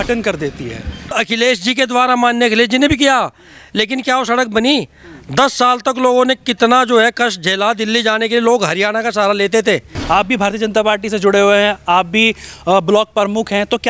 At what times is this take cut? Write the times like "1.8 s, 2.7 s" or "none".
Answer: 1.1 s, 9.9 s

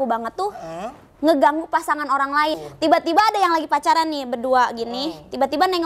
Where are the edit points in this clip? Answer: 2.6 s

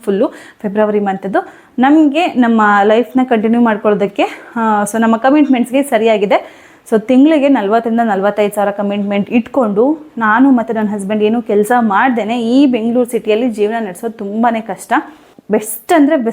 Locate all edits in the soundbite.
15.3 s

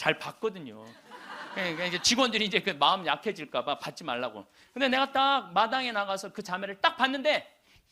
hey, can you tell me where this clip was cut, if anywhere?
none

